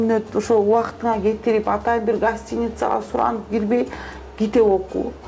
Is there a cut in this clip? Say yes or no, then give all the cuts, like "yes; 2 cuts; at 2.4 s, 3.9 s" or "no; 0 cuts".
no; 0 cuts